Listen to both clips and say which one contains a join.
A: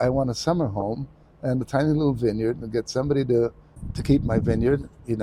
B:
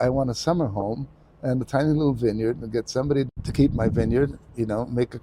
B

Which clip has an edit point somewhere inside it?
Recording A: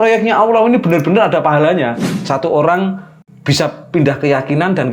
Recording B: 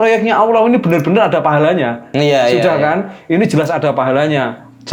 A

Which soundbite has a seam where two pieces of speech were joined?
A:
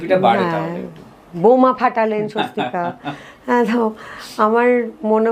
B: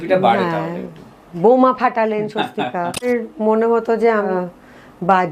B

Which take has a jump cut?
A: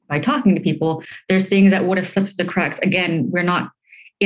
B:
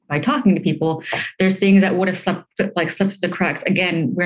A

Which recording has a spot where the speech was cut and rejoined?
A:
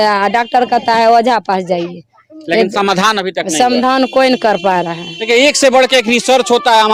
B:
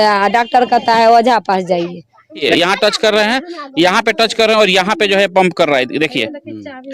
B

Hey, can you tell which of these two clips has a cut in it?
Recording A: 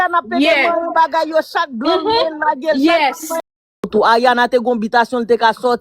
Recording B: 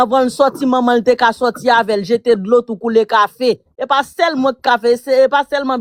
A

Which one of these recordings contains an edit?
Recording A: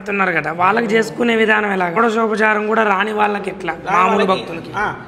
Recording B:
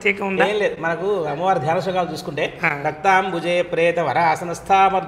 A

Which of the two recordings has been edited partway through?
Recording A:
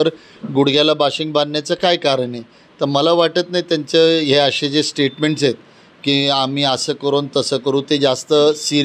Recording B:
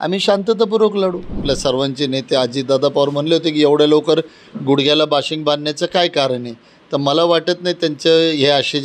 B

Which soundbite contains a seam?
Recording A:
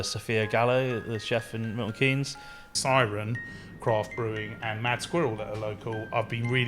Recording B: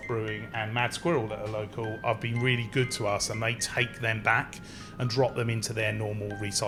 A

